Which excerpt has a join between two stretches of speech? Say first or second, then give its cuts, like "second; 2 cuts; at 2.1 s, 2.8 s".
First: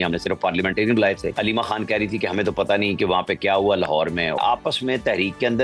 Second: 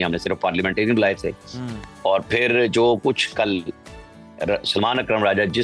first; 2 cuts; at 1.3 s, 4.4 s